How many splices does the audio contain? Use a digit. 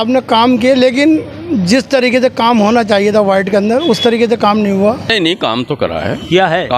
1